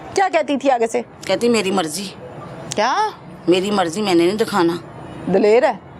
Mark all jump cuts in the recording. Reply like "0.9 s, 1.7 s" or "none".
none